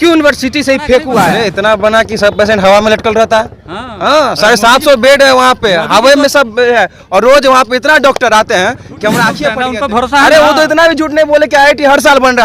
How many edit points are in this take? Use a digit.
2